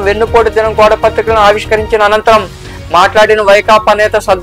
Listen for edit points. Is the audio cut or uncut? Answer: uncut